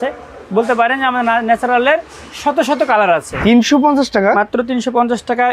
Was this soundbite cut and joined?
yes; 1 cut; at 3.3 s

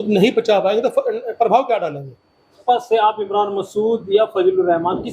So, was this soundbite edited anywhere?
yes; 1 cut; at 2.6 s

